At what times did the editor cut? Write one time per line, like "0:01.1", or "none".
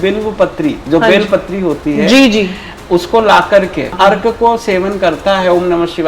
0:03.9